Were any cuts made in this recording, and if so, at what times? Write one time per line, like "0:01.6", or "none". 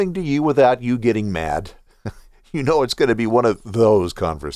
none